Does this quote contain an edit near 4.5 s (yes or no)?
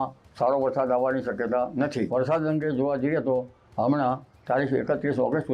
no